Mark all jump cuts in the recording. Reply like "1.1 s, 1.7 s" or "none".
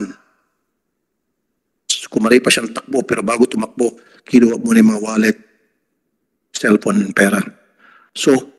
none